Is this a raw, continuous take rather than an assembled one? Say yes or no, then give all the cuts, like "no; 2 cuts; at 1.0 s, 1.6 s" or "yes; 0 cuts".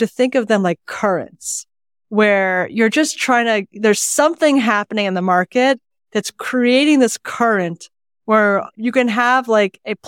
no; 1 cut; at 8.7 s